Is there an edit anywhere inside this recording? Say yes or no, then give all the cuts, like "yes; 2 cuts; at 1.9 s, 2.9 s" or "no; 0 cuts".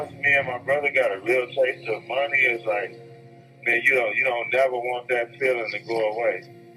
no; 0 cuts